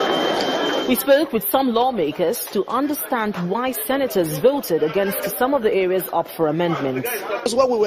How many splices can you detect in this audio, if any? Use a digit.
1